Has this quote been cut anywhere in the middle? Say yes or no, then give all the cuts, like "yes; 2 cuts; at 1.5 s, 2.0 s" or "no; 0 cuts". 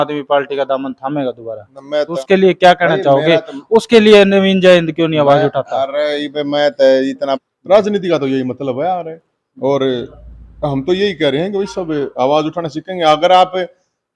yes; 2 cuts; at 2.1 s, 7.4 s